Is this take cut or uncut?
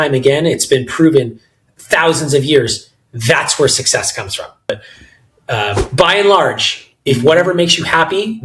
cut